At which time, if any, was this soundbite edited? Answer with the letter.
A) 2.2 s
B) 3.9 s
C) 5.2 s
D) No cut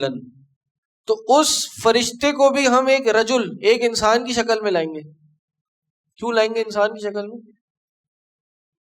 D